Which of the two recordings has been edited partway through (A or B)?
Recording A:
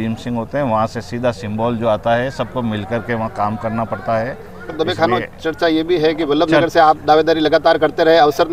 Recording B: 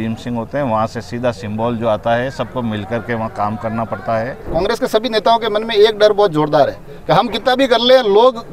B